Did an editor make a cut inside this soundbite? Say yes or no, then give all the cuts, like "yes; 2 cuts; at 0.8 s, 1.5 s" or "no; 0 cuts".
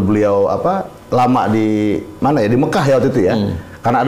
no; 0 cuts